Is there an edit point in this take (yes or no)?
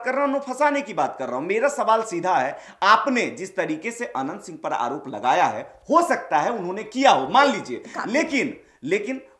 no